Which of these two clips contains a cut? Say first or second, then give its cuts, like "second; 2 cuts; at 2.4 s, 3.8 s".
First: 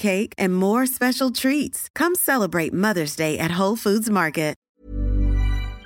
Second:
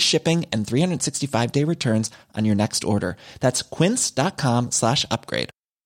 first; 1 cut; at 4.6 s